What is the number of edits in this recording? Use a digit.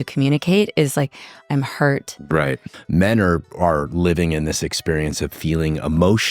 1